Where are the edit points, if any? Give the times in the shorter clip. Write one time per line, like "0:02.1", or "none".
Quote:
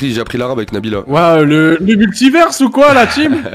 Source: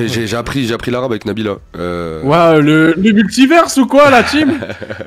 0:01.1